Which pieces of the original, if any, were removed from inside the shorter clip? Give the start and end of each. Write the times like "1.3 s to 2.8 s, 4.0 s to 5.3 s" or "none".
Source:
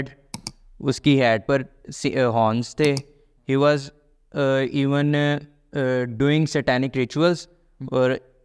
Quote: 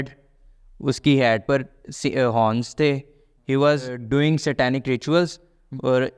4.0 s to 6.1 s